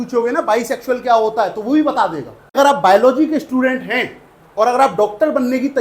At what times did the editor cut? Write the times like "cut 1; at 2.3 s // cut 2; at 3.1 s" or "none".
cut 1; at 2.6 s

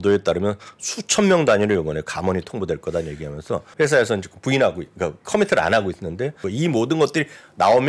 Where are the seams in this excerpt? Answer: cut 1; at 3.7 s // cut 2; at 6.4 s

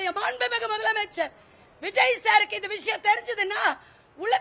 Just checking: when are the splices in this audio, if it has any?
none

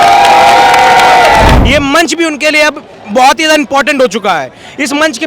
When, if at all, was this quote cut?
cut 1; at 1.6 s

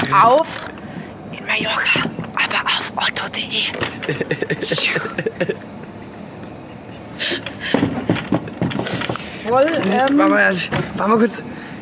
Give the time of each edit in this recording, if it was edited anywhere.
none

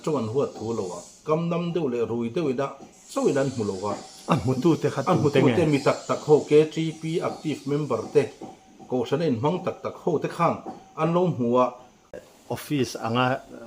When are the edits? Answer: cut 1; at 12.1 s

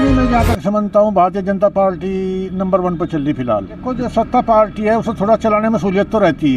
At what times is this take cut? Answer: cut 1; at 3.8 s

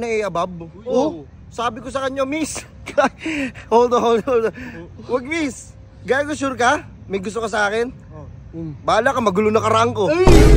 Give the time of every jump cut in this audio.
none

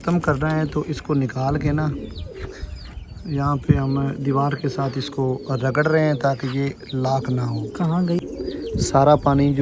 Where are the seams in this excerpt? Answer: cut 1; at 8.2 s

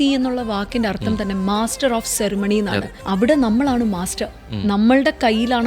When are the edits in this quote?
cut 1; at 2.9 s

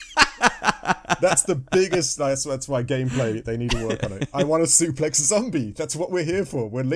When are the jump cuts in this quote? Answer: cut 1; at 1.2 s

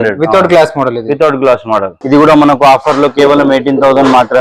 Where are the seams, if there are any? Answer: cut 1; at 1.9 s

